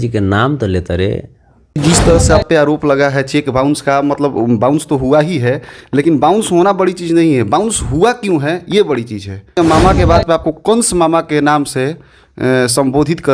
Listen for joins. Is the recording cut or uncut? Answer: cut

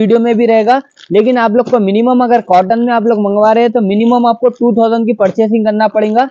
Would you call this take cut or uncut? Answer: uncut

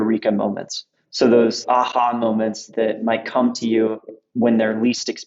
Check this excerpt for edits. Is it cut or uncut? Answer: cut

